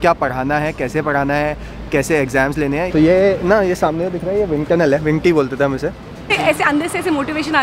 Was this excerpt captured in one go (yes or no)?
no